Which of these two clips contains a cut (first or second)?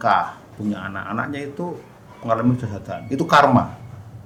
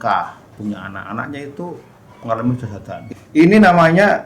second